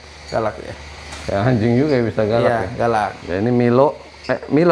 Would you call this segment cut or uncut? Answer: cut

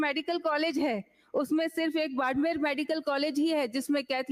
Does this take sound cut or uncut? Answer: uncut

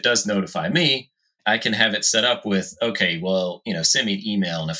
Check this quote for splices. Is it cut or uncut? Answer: uncut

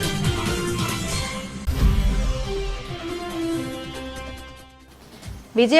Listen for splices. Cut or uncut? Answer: cut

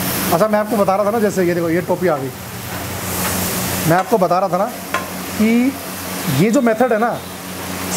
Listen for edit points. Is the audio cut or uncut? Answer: uncut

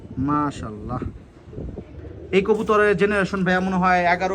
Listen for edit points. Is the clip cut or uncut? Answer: cut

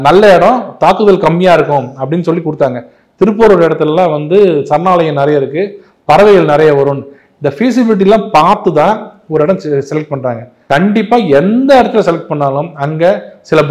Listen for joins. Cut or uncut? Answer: cut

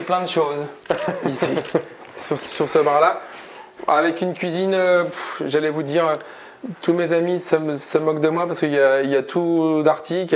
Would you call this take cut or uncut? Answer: uncut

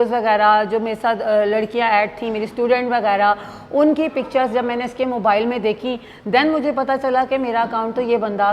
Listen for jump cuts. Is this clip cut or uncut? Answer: uncut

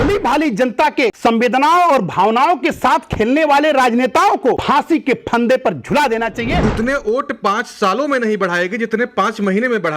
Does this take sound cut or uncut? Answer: cut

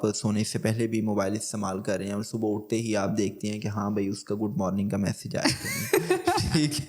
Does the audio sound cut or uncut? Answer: uncut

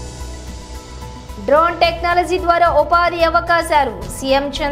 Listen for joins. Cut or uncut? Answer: uncut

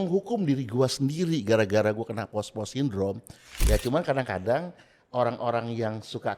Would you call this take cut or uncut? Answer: cut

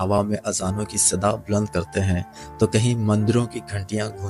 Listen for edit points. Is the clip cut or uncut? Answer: uncut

